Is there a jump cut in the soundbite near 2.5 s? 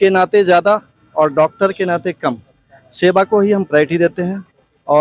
no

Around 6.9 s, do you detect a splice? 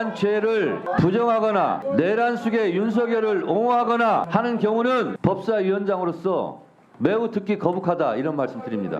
no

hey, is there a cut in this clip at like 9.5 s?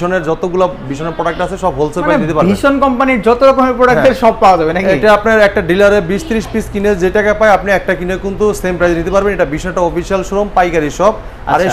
no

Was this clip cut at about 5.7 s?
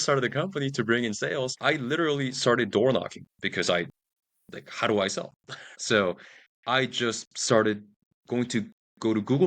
yes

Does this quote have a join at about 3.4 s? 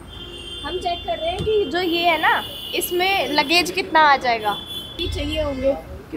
no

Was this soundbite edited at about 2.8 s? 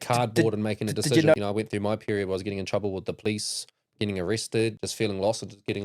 no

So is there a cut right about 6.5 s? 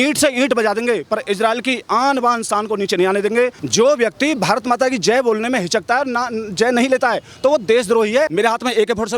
no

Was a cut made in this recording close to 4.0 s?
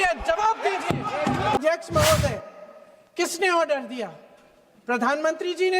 no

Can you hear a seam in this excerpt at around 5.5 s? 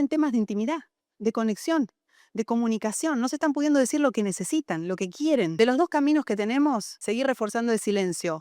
yes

